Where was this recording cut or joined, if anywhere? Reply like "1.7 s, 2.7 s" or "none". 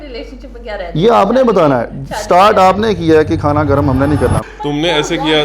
4.4 s